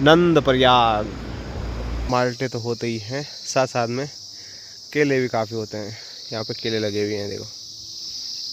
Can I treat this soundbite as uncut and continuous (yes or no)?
no